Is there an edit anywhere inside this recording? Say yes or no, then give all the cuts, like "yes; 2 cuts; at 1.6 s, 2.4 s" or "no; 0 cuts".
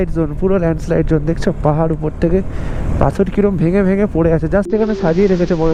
no; 0 cuts